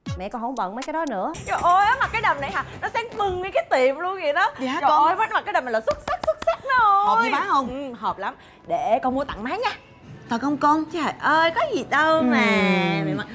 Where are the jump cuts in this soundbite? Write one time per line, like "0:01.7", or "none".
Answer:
0:01.4